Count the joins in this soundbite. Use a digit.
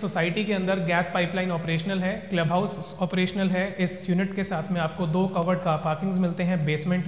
0